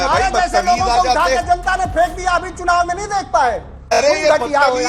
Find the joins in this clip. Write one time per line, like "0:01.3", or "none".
0:04.0

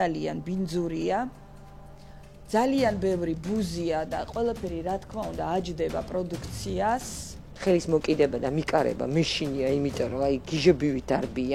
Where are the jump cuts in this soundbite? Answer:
0:07.4

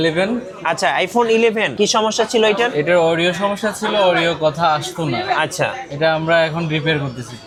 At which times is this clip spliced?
none

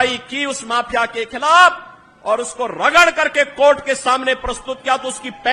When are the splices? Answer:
none

